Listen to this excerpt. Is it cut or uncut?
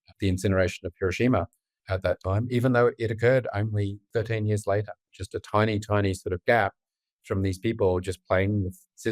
cut